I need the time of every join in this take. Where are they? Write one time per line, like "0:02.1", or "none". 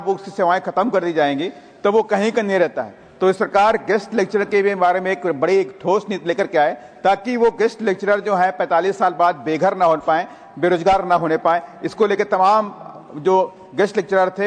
none

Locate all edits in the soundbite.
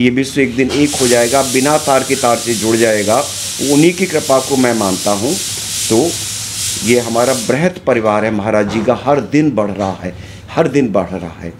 none

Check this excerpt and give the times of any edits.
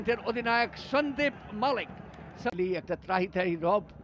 0:02.5

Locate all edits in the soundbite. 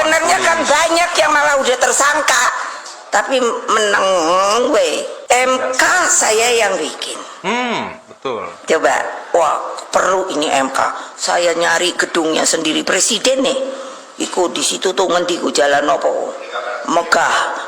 0:05.1

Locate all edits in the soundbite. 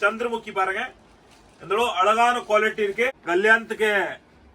0:03.2

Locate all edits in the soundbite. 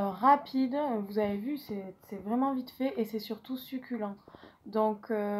0:01.1

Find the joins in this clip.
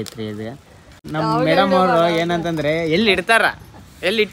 0:01.0

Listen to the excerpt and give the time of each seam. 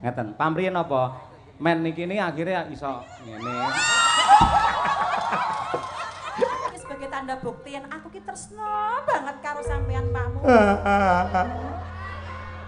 0:06.7

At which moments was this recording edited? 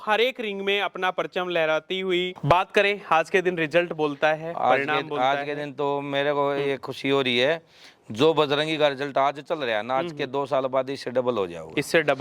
0:02.4

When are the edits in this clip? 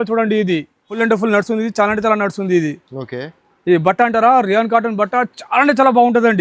0:01.0

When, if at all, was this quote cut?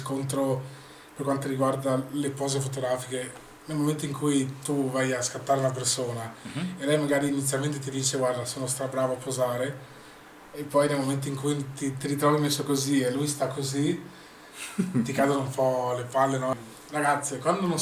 0:16.5

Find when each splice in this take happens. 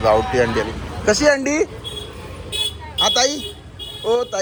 none

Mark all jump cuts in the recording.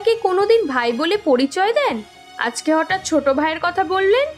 none

